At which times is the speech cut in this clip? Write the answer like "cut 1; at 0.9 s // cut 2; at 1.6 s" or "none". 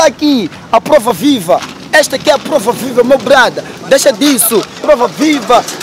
none